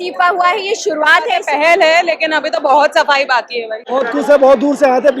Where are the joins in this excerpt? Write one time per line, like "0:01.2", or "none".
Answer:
0:01.4
0:03.8